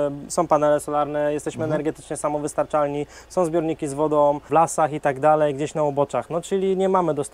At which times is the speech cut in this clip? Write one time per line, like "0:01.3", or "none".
0:04.5